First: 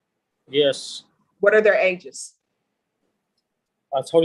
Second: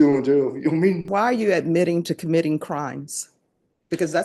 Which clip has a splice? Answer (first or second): second